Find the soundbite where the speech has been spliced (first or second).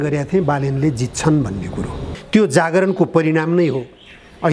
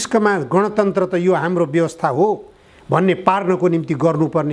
first